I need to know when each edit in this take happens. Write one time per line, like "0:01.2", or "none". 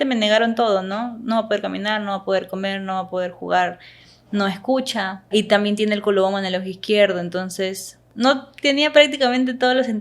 0:05.2
0:08.0